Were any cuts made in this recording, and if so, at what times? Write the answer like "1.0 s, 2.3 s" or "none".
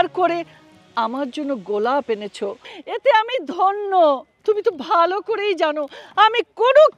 4.3 s